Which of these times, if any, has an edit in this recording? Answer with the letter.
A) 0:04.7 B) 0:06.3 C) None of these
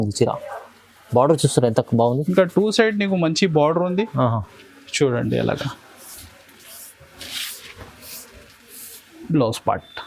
C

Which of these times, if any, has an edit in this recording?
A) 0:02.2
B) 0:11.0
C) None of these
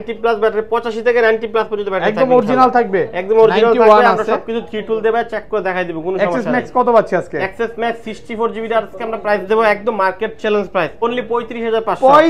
B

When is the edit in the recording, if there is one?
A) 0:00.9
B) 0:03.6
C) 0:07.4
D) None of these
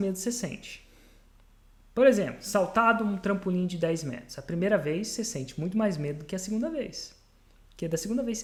D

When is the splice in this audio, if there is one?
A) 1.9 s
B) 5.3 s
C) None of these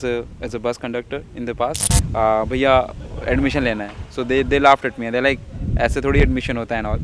A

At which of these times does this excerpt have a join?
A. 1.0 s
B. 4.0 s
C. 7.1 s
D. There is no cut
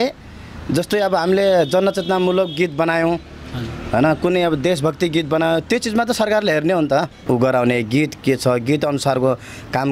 C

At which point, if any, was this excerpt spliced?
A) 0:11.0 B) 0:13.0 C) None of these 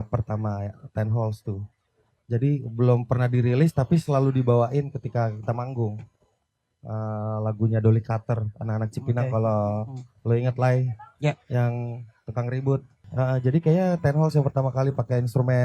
B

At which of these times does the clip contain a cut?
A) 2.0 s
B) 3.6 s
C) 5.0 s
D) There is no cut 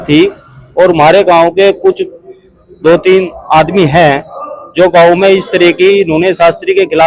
D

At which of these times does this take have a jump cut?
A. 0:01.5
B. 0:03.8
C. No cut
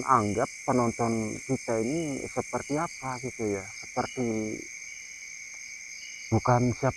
C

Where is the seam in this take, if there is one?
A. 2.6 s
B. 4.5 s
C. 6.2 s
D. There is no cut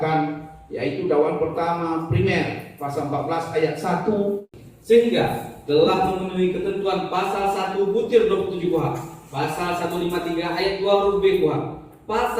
B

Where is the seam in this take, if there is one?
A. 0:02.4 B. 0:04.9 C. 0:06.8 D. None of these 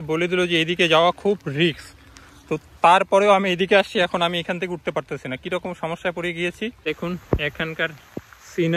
C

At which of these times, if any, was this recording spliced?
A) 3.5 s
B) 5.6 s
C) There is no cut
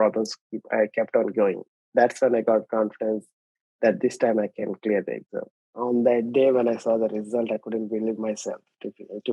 B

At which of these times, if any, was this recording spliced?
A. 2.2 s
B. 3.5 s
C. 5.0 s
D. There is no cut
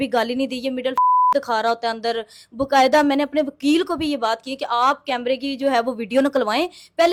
D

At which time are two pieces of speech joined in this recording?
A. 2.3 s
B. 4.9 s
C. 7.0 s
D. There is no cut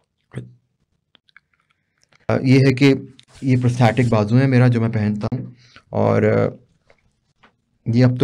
A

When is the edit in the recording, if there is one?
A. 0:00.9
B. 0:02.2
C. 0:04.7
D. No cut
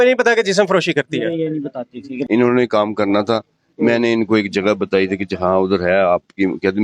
B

